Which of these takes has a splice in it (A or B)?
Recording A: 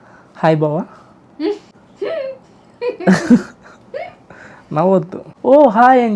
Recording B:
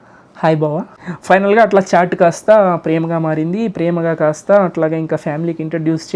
B